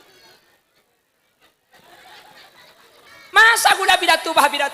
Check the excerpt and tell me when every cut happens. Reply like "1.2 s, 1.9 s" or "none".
3.1 s